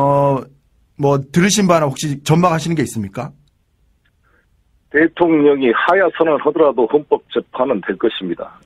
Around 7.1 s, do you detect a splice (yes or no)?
yes